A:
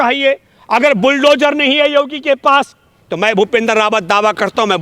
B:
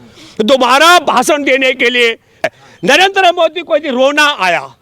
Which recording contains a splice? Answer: B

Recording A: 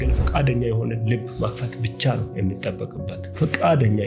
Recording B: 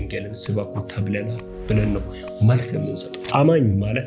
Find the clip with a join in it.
B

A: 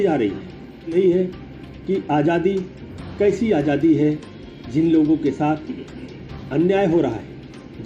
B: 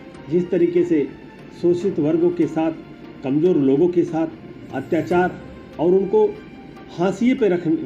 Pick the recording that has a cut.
A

